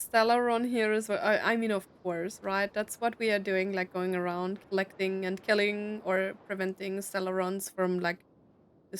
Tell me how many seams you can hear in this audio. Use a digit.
0